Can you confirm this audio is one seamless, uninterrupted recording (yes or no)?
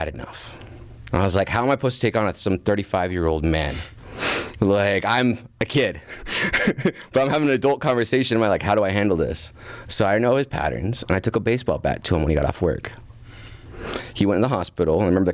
yes